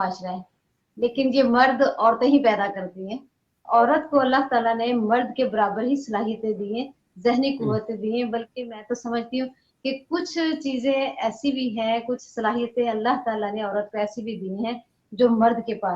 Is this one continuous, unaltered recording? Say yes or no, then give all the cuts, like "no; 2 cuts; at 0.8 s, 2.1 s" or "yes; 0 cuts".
no; 1 cut; at 3.6 s